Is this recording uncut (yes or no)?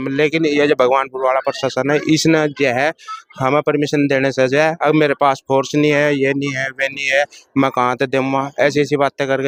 yes